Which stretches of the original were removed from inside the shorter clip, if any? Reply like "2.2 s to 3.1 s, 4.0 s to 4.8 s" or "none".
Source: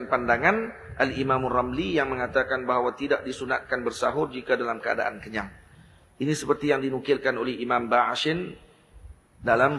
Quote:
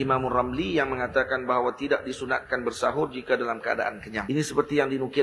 5.4 s to 6.1 s